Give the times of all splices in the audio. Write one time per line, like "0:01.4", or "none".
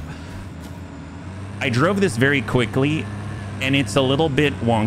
none